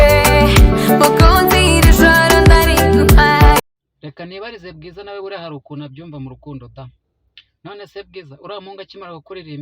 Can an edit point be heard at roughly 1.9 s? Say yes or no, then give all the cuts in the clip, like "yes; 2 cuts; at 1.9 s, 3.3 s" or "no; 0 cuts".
no; 1 cut; at 3.7 s